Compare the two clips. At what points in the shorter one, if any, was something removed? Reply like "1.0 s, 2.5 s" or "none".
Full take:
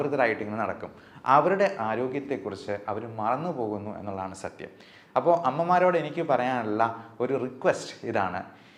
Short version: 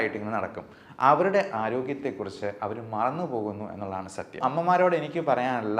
4.4 s